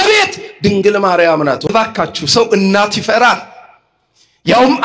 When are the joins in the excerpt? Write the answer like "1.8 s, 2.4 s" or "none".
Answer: 1.7 s